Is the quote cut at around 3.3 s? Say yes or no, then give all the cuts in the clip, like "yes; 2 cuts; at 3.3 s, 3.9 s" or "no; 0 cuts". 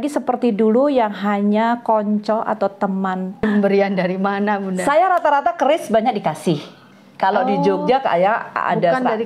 yes; 1 cut; at 3.3 s